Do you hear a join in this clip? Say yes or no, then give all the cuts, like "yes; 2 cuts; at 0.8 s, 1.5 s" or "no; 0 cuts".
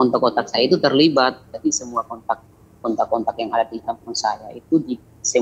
yes; 1 cut; at 1.5 s